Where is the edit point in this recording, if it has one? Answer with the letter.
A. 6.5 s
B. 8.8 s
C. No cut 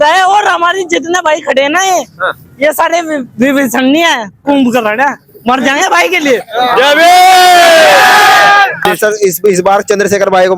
B